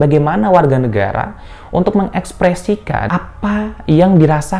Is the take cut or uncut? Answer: cut